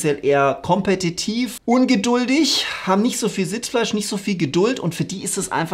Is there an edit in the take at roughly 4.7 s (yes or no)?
no